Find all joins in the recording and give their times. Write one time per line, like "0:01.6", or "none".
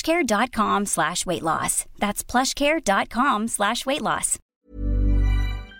0:04.6